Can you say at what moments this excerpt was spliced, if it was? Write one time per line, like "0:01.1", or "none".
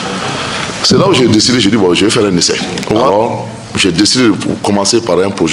0:03.1